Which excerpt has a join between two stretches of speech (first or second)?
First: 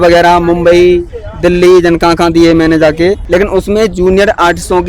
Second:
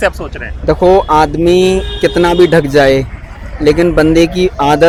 first